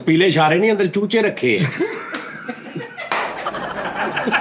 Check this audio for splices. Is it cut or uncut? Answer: uncut